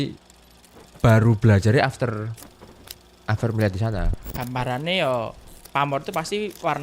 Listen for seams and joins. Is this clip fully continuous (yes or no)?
no